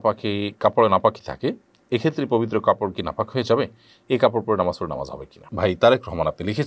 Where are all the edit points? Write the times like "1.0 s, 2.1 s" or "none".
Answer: 5.4 s